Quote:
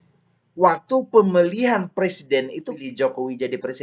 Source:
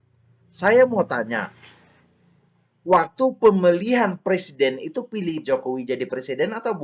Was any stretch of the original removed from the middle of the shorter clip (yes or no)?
yes